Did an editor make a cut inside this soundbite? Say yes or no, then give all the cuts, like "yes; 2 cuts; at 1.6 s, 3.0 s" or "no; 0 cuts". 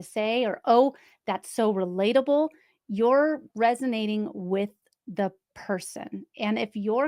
no; 0 cuts